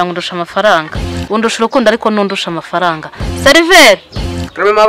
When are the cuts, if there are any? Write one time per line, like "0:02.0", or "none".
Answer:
none